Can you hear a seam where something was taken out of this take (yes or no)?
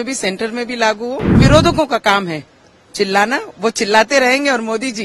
yes